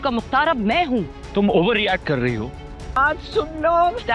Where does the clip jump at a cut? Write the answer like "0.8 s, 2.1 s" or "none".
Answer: 3.0 s